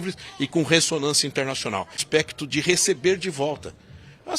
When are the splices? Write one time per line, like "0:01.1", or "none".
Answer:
0:02.0

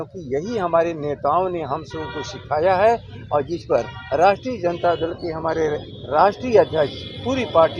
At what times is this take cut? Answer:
none

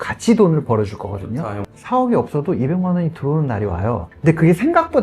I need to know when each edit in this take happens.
0:01.4
0:04.1

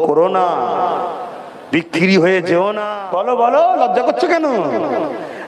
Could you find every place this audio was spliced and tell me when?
0:02.9

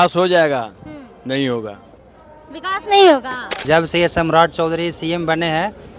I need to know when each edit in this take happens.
0:03.6

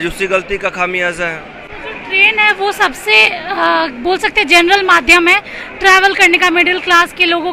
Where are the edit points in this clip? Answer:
none

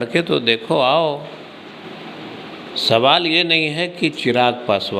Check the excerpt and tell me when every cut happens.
none

